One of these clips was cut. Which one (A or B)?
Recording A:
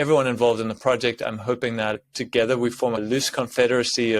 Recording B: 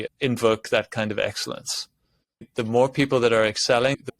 A